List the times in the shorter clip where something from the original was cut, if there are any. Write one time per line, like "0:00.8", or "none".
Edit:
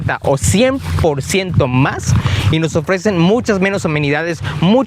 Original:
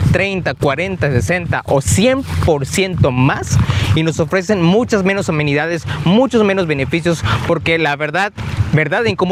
none